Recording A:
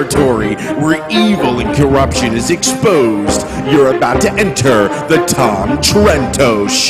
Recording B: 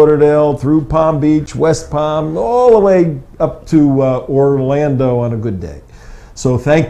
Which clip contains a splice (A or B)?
B